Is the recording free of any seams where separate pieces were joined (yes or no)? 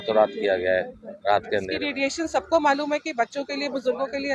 no